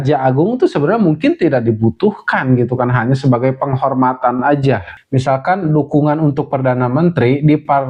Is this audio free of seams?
no; 1 cut; at 4.9 s

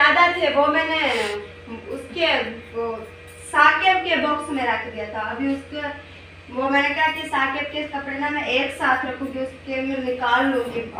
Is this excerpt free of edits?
yes; 0 cuts

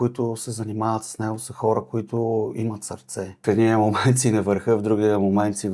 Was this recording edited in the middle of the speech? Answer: yes; 1 cut; at 3.4 s

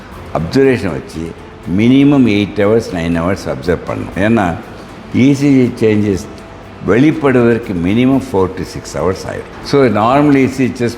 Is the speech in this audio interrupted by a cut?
yes; 2 cuts; at 4.1 s, 9.5 s

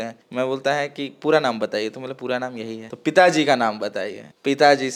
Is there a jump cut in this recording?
no; 0 cuts

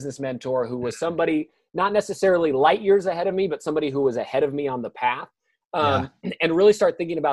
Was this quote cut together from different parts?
no; 0 cuts

